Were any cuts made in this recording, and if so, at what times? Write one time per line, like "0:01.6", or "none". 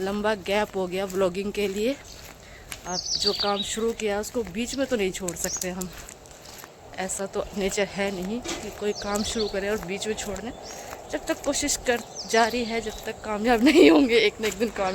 none